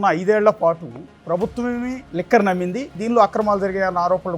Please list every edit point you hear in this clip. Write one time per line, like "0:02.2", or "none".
0:02.0
0:02.9